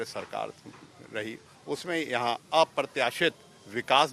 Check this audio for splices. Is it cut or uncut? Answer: uncut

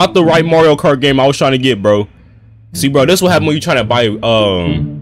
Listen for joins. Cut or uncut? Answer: uncut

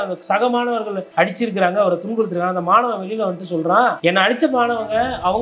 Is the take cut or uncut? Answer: cut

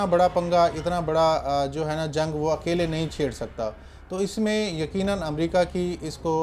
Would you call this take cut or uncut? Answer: uncut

